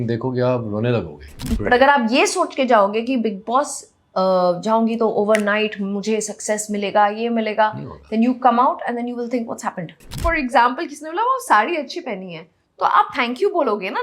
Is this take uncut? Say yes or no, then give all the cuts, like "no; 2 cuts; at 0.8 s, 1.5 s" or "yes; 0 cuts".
no; 2 cuts; at 1.5 s, 10.2 s